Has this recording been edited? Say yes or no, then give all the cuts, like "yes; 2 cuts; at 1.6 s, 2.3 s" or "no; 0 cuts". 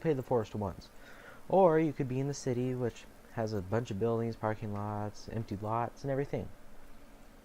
yes; 1 cut; at 6.1 s